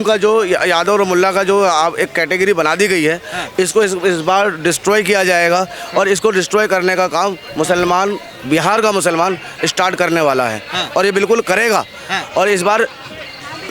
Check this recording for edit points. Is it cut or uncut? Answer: uncut